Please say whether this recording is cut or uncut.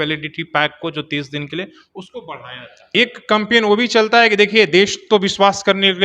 cut